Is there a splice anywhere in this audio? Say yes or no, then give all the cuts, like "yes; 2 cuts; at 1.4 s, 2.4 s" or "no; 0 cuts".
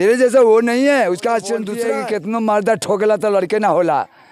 yes; 1 cut; at 1.8 s